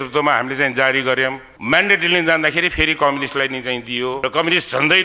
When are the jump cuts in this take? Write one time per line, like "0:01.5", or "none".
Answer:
0:01.5
0:04.2